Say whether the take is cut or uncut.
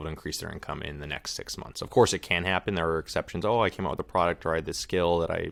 uncut